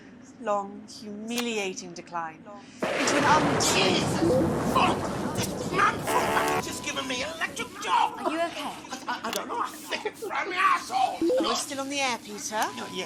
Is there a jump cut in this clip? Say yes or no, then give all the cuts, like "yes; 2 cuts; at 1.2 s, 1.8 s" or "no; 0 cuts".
no; 0 cuts